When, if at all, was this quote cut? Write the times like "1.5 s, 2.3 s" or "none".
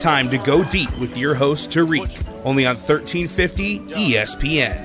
none